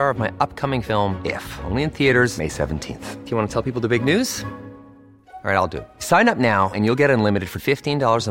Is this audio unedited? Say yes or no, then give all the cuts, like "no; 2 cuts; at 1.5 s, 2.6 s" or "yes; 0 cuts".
yes; 0 cuts